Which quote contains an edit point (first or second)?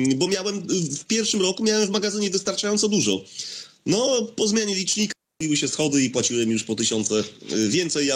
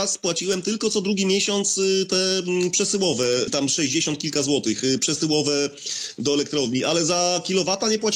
second